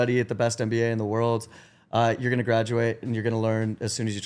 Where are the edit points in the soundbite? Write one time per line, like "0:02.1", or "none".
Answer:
none